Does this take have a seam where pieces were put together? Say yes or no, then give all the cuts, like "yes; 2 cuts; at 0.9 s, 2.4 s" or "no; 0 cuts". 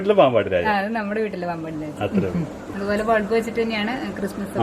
yes; 1 cut; at 2.7 s